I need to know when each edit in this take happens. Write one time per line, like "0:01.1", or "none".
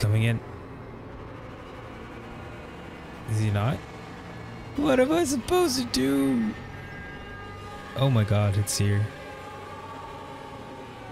0:04.7

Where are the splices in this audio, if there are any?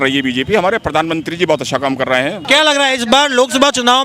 0:02.4

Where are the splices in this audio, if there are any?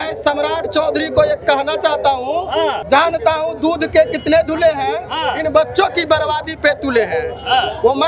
0:02.8

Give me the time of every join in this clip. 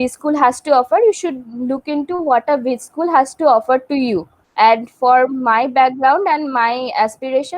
0:04.4

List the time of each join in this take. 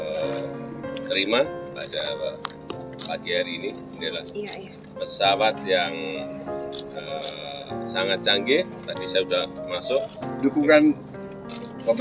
0:10.2

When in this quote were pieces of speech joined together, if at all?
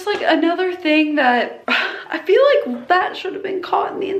none

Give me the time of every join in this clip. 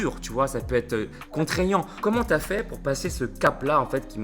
0:02.0

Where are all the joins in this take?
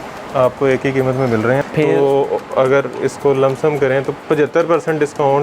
0:01.6

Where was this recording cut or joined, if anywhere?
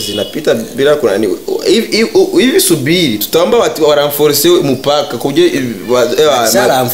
none

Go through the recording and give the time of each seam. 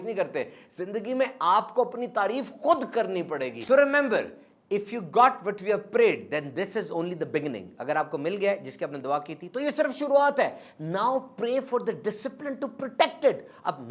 0:03.6

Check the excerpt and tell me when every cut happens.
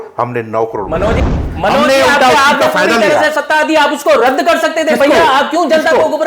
0:01.2

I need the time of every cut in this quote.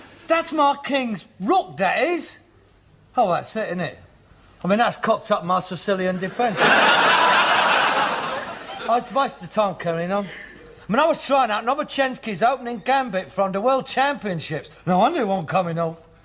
0:10.8

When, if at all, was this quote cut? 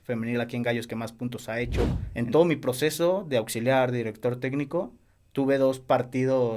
0:02.0

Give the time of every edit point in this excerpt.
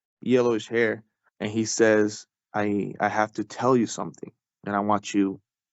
0:02.4

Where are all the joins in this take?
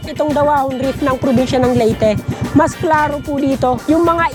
none

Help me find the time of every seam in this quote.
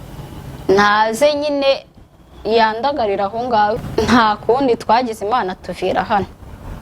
0:03.8

